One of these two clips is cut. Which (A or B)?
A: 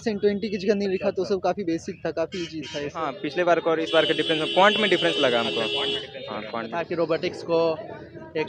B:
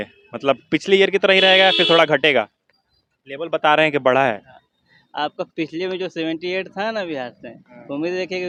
A